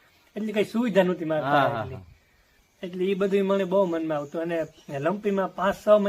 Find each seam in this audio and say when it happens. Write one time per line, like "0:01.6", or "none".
none